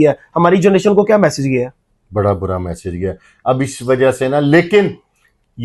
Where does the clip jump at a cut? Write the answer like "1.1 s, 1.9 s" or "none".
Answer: none